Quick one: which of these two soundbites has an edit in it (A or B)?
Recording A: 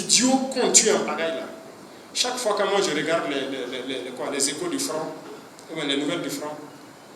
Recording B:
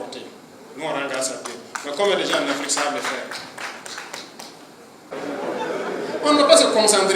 B